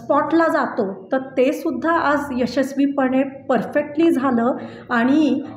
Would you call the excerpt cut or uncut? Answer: uncut